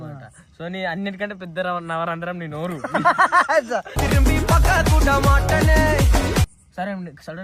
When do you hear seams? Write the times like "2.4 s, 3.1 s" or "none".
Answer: 6.5 s

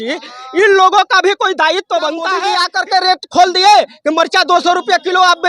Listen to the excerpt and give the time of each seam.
2.4 s

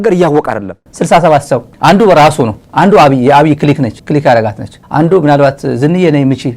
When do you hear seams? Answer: 0.9 s, 1.7 s, 2.6 s

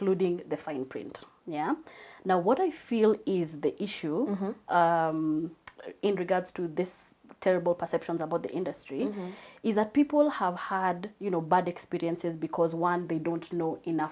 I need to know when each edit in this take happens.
none

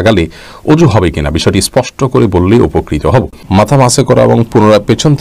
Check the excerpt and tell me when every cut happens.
3.4 s

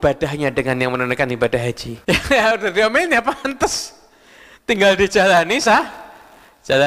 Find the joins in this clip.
1.9 s

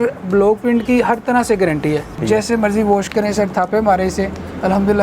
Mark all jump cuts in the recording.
2.2 s

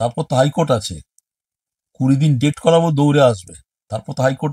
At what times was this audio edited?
none

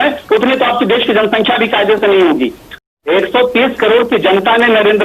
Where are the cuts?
2.9 s

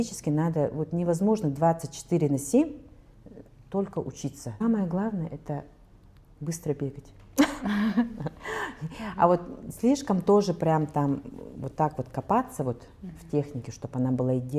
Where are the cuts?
4.6 s

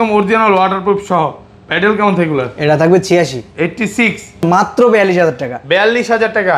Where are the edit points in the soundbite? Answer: 4.4 s

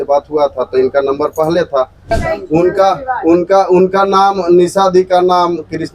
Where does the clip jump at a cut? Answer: 2.1 s

